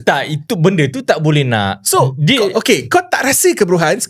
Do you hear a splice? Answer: no; 0 cuts

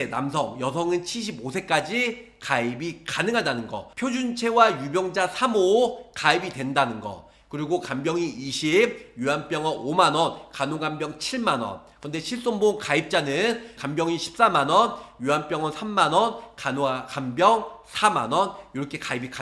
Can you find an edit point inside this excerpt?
yes; 2 cuts; at 3.8 s, 13.7 s

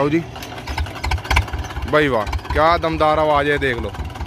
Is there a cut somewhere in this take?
no; 0 cuts

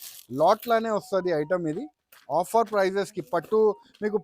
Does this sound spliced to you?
no; 0 cuts

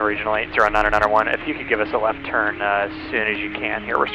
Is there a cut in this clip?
no; 0 cuts

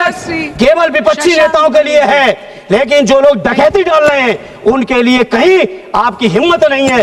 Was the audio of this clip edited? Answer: no; 0 cuts

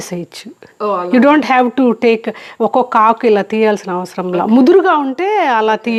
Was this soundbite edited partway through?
no; 0 cuts

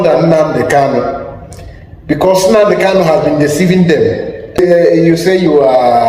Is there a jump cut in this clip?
yes; 1 cut; at 4.6 s

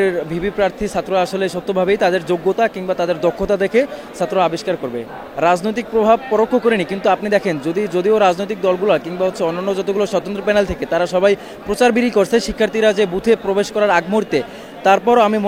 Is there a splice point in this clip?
no; 0 cuts

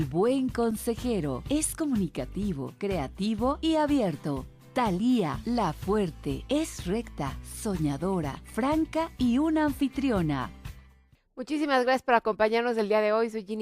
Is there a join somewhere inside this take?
yes; 1 cut; at 6.7 s

